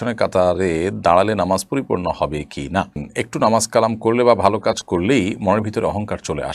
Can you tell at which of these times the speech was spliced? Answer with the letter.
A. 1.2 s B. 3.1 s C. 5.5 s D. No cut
B